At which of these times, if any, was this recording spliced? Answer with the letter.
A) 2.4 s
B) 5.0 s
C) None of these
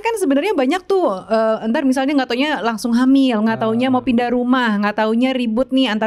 C